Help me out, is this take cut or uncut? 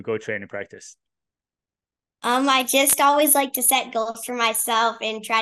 uncut